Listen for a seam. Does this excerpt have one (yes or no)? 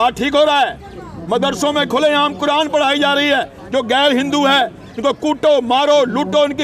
no